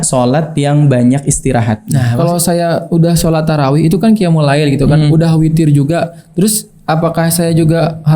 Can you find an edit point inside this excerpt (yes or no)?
yes